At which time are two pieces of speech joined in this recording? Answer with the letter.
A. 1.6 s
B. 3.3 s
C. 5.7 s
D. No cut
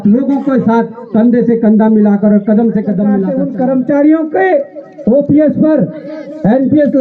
B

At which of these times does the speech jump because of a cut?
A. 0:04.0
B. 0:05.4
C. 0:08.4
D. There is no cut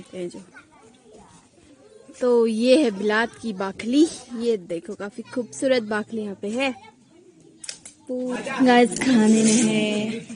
C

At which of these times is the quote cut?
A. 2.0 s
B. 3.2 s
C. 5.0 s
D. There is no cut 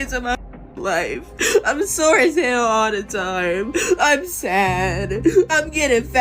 D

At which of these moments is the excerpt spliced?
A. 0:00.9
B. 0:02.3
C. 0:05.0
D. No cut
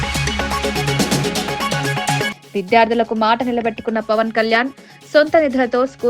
B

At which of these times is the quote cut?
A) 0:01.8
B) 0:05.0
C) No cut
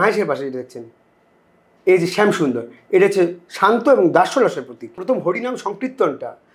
B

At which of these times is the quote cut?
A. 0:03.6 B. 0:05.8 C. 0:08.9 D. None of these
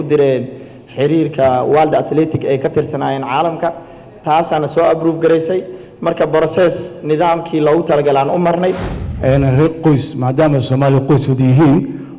C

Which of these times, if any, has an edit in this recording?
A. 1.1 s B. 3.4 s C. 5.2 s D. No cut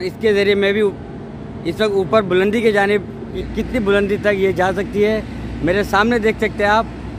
B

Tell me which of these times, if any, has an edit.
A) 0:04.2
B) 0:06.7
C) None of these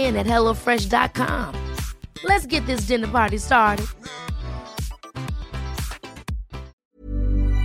B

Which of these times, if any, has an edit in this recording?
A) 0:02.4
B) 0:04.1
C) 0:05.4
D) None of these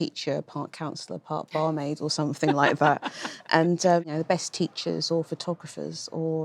B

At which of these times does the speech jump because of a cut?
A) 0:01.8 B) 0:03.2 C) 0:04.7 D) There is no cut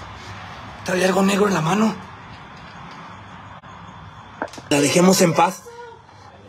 C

